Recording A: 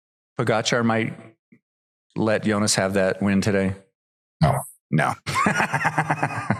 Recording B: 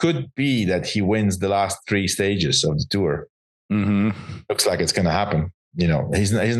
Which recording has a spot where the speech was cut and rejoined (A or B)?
B